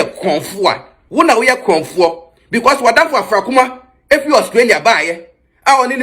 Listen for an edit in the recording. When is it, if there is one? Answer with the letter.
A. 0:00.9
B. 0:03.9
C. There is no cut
A